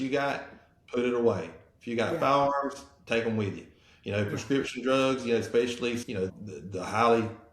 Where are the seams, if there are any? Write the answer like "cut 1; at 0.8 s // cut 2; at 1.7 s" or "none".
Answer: cut 1; at 6.1 s